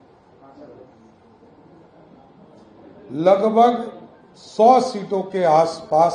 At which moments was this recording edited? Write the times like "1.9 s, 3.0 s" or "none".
none